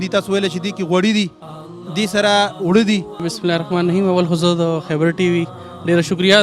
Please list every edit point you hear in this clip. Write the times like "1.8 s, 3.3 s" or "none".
3.3 s